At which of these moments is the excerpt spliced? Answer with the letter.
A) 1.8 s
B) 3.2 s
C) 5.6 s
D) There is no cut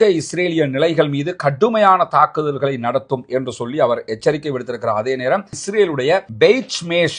C